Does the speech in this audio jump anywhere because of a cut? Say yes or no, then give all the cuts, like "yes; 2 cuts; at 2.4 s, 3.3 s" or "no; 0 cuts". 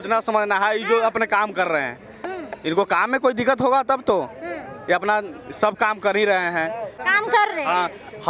no; 0 cuts